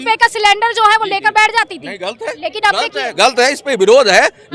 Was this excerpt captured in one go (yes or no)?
yes